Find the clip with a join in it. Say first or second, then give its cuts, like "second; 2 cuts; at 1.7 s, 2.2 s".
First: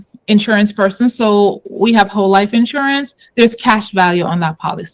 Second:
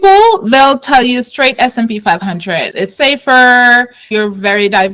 second; 2 cuts; at 2.7 s, 4.1 s